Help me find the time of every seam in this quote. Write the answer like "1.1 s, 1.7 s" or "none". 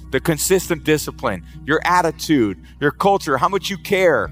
none

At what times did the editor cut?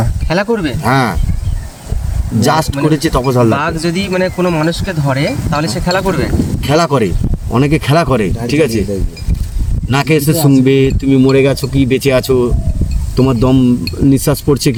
none

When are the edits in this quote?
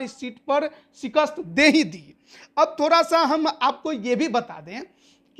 none

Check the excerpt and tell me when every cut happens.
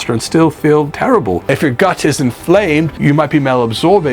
1.4 s, 2.9 s

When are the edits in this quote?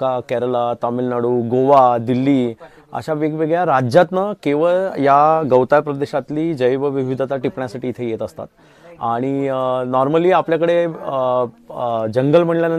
none

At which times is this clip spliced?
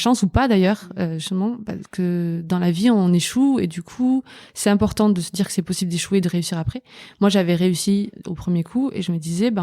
none

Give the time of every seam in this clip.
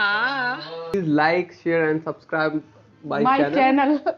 0.9 s

